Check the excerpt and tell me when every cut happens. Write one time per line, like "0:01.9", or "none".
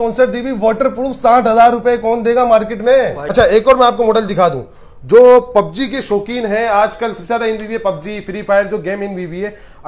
0:03.2